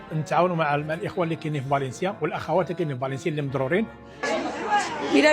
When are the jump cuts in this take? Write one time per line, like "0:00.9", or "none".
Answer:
0:04.2